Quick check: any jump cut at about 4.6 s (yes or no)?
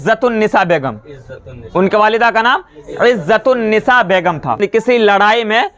yes